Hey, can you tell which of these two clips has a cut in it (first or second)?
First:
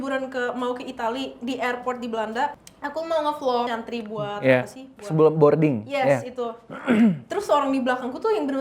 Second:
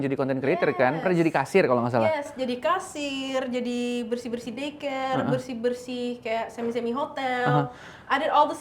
first